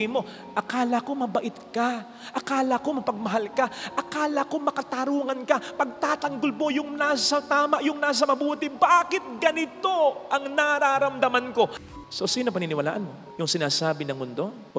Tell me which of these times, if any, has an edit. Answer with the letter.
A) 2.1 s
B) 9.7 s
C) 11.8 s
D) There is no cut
C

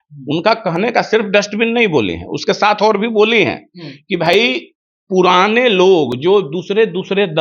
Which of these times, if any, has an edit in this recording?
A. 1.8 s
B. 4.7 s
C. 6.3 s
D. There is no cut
D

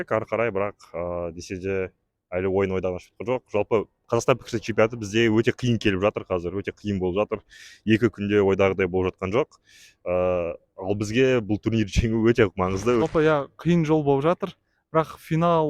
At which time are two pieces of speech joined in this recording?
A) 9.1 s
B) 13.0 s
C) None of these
B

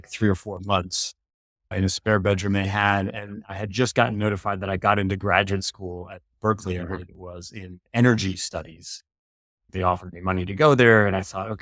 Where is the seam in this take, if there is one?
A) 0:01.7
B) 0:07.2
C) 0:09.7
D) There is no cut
C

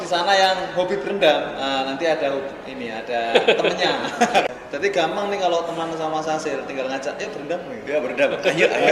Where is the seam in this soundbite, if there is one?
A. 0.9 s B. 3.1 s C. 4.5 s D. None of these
C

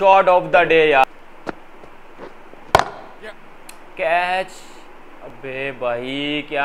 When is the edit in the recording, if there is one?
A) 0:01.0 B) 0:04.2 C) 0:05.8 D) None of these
A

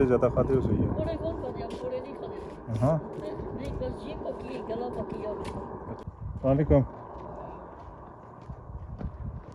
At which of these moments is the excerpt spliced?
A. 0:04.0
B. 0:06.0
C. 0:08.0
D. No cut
B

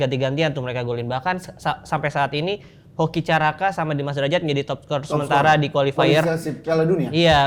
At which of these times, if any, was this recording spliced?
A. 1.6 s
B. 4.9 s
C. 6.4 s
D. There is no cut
D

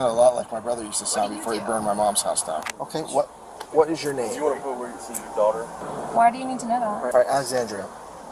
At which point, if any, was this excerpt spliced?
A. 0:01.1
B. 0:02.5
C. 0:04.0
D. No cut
D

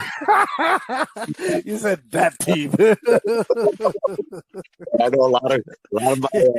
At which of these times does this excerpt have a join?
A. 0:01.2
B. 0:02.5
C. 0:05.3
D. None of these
D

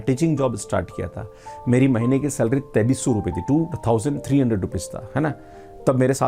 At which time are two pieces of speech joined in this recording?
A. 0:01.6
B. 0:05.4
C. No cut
C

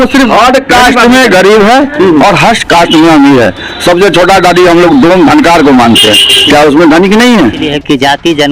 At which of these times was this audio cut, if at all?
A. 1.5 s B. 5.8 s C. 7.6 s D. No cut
C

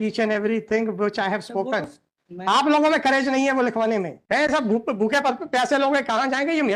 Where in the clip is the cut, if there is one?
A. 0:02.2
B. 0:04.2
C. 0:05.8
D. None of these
B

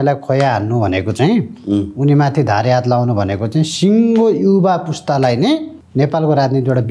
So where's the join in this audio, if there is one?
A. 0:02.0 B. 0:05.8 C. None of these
B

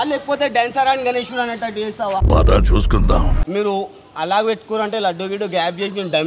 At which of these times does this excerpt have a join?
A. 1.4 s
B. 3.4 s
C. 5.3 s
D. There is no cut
B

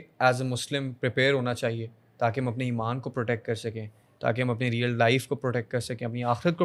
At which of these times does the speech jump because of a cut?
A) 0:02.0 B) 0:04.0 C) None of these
C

